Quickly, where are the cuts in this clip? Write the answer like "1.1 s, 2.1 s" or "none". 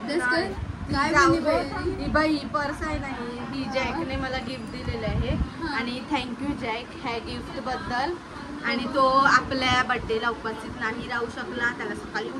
none